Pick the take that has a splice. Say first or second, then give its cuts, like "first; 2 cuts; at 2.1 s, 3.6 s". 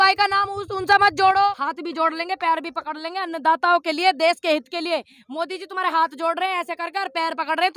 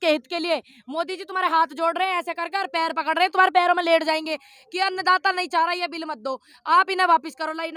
first; 1 cut; at 1.5 s